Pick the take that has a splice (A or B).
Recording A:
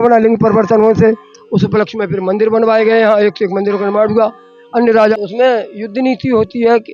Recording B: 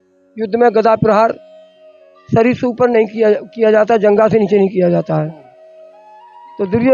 A